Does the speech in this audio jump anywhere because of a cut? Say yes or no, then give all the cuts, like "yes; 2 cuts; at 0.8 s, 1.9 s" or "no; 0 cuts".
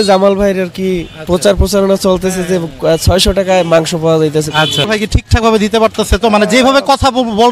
yes; 1 cut; at 4.8 s